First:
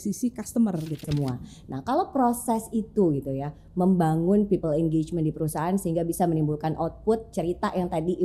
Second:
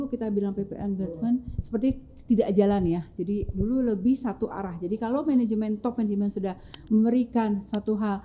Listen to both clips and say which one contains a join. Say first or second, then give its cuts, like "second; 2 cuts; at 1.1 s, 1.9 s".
first; 1 cut; at 1.0 s